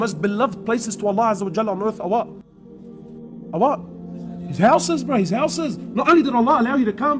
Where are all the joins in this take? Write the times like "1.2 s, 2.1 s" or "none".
none